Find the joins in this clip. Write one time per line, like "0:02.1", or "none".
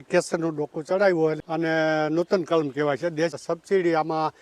0:01.4
0:03.3